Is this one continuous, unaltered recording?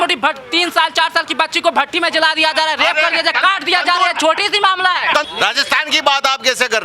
no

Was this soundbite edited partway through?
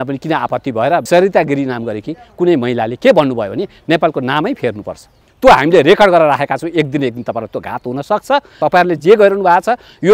yes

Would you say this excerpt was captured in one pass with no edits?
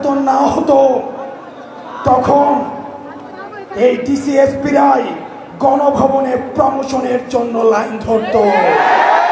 yes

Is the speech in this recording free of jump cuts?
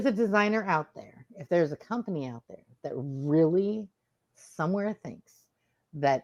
yes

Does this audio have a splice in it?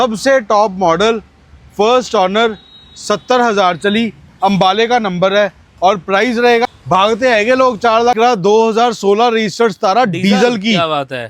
yes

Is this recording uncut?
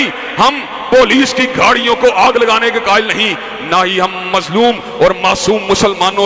yes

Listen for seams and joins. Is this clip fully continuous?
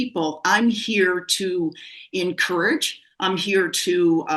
yes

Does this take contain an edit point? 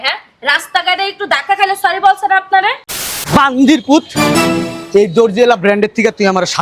yes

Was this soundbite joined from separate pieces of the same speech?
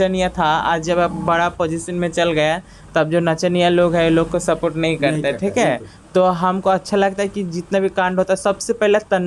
no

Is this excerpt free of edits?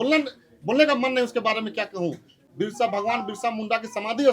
no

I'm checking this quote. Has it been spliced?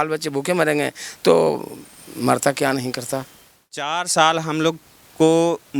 yes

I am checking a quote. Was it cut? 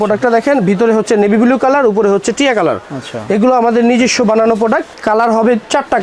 no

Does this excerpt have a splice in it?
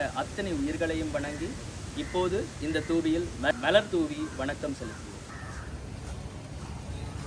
yes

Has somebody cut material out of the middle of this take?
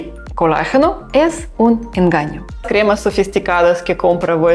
yes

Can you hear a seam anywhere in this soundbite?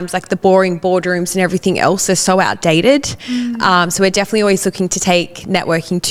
no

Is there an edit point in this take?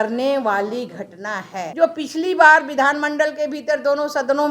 yes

